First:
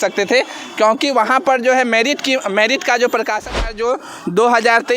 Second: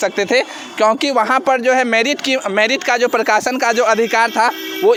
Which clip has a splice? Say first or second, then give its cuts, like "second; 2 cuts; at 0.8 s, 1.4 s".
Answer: first; 1 cut; at 3.7 s